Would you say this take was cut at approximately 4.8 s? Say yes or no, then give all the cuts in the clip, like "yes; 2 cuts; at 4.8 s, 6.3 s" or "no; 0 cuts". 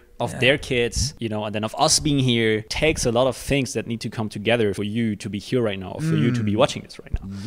yes; 3 cuts; at 1.1 s, 2.7 s, 4.8 s